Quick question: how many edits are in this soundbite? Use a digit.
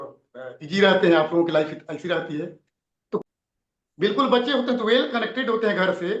1